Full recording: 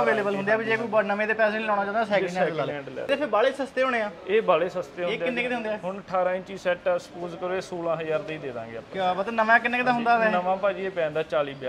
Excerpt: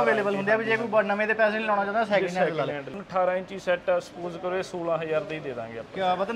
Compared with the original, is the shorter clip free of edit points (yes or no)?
no